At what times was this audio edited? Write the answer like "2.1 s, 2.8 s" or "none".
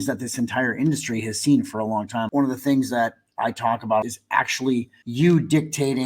2.3 s, 4.0 s, 5.0 s